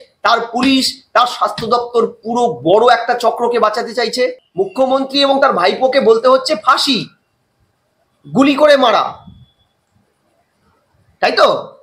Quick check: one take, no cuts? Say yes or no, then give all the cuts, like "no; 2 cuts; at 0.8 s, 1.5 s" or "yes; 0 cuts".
no; 1 cut; at 4.4 s